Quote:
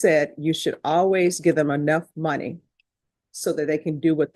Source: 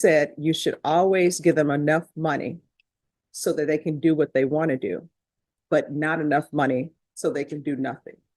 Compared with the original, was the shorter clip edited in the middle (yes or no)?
no